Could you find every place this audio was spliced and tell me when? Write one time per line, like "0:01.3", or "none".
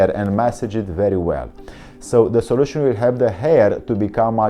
none